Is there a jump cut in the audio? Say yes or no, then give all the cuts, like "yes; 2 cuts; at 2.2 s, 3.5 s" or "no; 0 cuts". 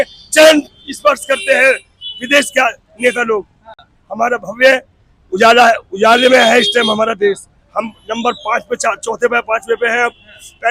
no; 0 cuts